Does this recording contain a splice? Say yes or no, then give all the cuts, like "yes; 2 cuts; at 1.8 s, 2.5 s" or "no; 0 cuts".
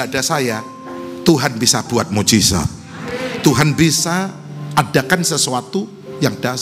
no; 0 cuts